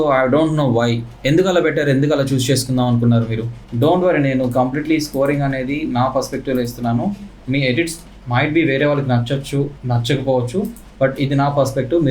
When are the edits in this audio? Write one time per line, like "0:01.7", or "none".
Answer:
0:03.6